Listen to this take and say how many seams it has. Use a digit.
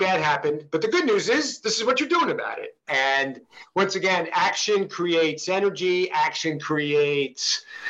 0